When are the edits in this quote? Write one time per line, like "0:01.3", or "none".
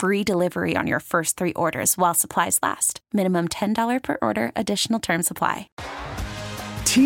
0:05.7

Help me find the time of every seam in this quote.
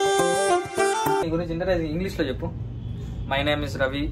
0:01.2

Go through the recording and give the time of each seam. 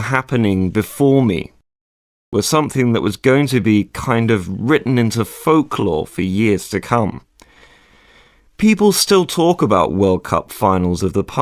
none

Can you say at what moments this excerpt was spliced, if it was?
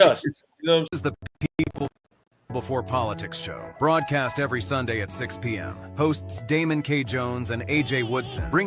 0:00.9

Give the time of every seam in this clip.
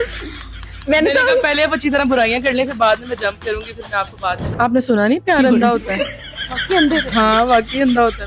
0:04.4

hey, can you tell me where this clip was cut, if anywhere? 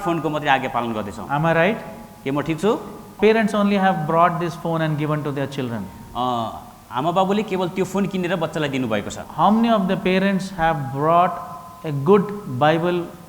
0:03.2
0:09.2

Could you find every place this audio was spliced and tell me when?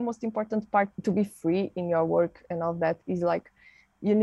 0:00.9

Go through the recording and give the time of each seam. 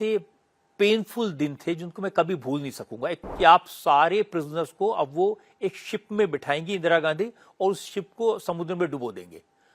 0:03.2

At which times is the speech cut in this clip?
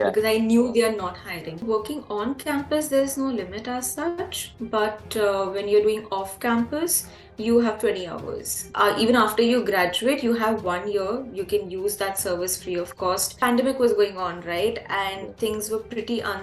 0:01.6
0:08.6
0:13.3

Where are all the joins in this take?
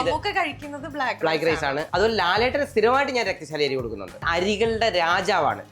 0:01.8
0:04.2

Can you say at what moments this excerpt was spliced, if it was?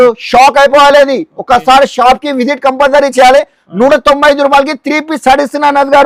none

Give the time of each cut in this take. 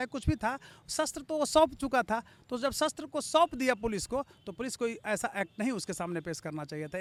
none

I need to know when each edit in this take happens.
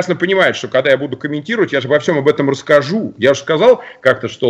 none

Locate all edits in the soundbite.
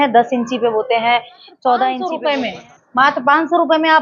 0:02.1

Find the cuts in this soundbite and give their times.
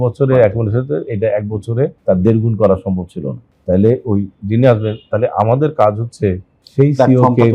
0:02.0

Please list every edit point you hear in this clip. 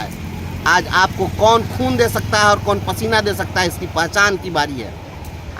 none

